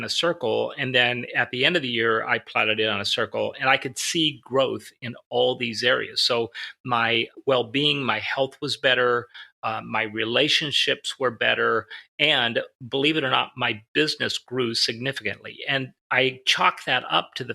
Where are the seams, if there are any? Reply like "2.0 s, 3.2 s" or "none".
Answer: 7.3 s, 16.0 s